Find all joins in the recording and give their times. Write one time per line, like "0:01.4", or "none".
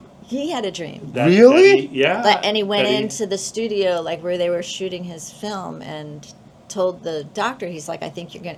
none